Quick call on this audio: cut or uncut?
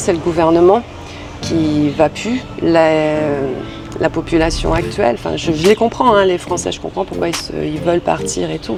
uncut